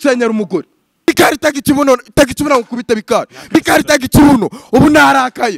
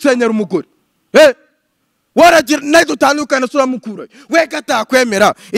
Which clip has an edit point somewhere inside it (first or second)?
first